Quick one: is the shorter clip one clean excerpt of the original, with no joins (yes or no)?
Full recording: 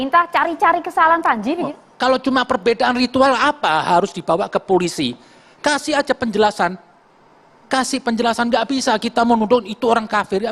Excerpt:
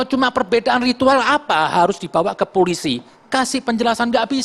no